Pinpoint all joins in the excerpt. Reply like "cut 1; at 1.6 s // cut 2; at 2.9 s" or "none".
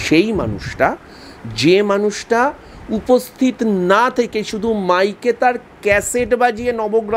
none